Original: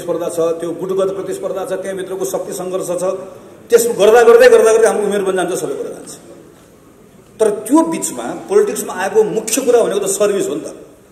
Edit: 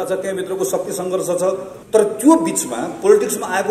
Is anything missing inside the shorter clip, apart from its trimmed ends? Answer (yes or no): yes